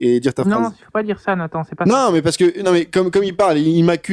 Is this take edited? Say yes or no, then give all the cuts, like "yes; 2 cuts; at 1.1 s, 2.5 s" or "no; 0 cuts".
no; 0 cuts